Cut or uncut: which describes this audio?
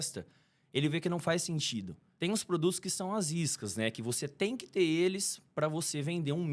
uncut